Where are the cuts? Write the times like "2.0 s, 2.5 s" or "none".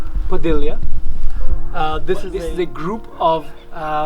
2.3 s